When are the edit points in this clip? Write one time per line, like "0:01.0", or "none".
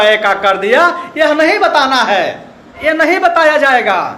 0:02.8